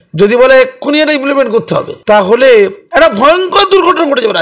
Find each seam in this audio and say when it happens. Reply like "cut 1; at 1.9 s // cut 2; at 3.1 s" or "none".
cut 1; at 1.9 s // cut 2; at 2.8 s